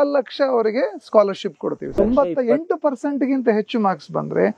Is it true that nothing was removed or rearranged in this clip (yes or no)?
no